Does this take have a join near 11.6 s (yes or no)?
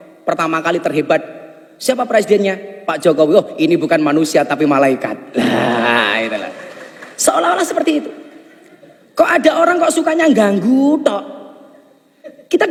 no